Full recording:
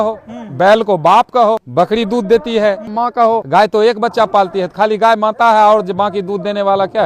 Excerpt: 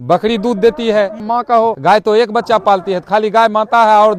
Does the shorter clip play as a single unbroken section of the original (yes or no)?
yes